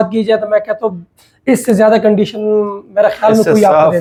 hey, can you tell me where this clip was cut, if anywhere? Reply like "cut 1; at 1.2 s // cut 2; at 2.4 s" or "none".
none